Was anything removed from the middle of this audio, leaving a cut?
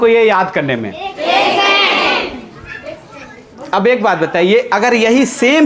no; 0 cuts

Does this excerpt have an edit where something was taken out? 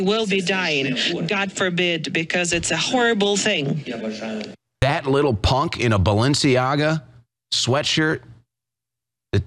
yes; 1 cut; at 4.7 s

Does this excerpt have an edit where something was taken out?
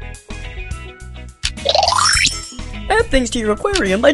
yes; 1 cut; at 1.3 s

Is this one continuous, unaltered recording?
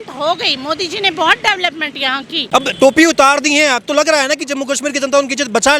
no; 1 cut; at 2.4 s

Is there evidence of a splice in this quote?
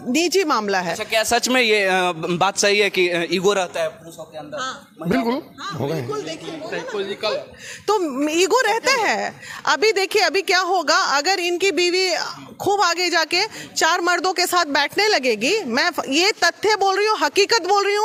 no; 0 cuts

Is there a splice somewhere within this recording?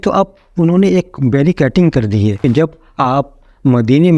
yes; 1 cut; at 2.4 s

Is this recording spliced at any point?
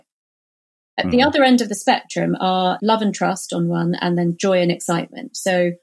yes; 1 cut; at 2.8 s

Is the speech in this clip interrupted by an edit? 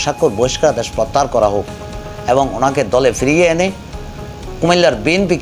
no; 0 cuts

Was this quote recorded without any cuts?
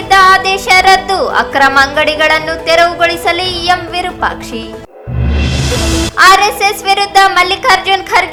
yes; 0 cuts

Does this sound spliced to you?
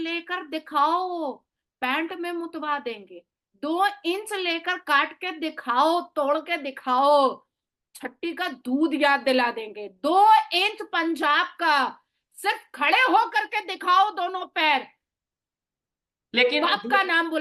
no; 0 cuts

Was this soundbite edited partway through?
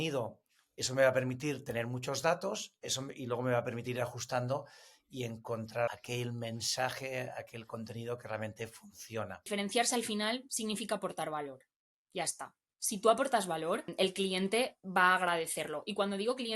yes; 3 cuts; at 5.9 s, 9.4 s, 13.9 s

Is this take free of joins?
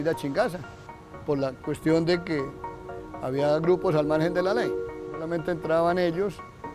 no; 1 cut; at 4.9 s

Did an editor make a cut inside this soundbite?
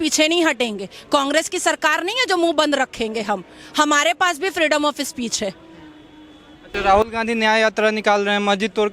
no; 0 cuts

